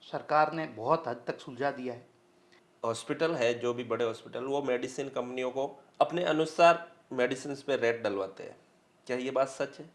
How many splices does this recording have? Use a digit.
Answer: 1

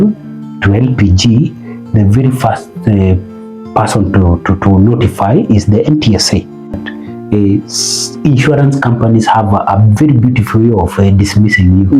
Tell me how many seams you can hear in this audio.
1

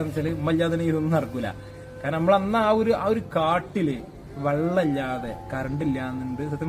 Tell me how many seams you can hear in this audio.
0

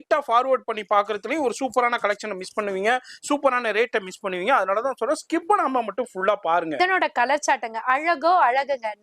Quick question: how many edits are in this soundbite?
1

